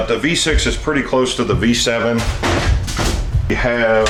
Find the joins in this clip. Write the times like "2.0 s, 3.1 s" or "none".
none